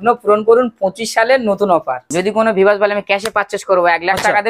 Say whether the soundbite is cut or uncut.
cut